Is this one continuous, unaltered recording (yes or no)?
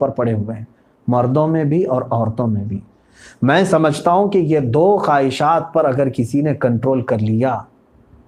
yes